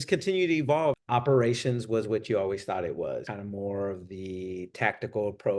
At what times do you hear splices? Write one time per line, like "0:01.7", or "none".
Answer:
0:01.0
0:03.3